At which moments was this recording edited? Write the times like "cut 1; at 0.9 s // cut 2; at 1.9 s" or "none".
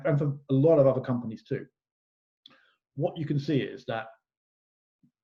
none